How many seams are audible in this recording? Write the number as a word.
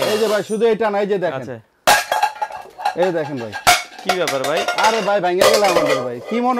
zero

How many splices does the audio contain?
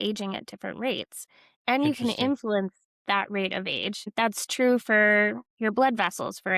one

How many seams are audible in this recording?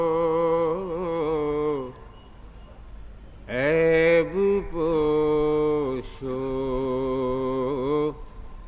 one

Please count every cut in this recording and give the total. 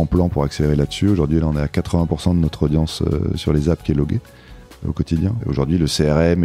one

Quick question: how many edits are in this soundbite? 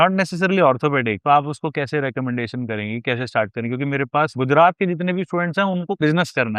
zero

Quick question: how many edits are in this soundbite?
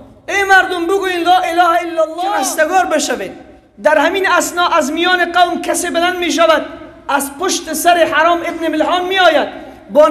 one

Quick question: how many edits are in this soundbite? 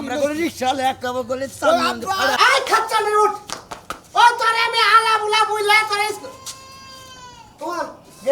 one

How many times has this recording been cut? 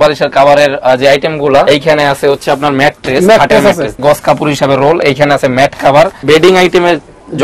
three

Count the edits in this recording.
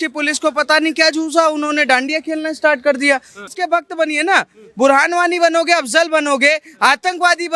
one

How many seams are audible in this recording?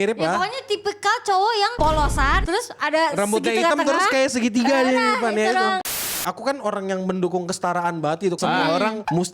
three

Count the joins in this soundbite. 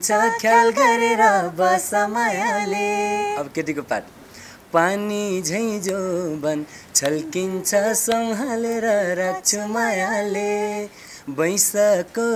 zero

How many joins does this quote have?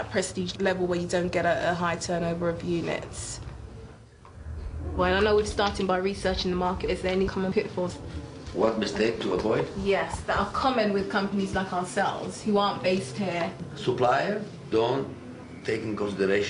one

